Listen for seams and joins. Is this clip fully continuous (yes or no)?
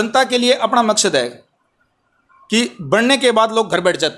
yes